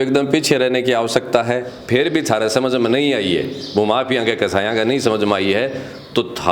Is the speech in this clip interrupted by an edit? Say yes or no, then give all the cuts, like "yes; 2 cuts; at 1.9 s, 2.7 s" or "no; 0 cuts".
yes; 1 cut; at 1.7 s